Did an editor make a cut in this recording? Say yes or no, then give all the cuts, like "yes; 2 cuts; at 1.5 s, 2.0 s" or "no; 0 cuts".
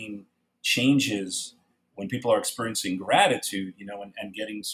no; 0 cuts